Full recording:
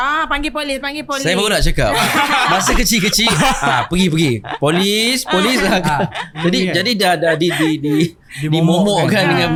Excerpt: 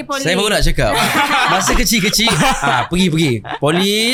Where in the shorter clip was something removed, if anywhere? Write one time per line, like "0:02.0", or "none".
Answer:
none